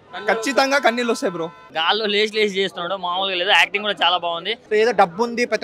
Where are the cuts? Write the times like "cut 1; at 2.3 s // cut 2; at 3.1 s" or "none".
cut 1; at 1.6 s // cut 2; at 4.5 s